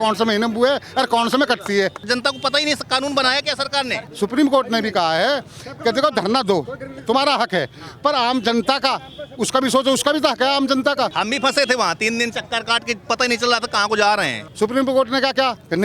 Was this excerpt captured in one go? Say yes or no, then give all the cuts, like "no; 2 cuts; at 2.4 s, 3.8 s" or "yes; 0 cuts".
no; 4 cuts; at 2.0 s, 4.1 s, 11.2 s, 14.4 s